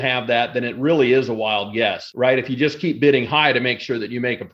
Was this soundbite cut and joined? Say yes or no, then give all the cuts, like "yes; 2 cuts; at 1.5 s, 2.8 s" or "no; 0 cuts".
yes; 1 cut; at 2.0 s